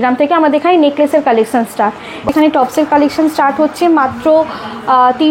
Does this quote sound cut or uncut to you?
cut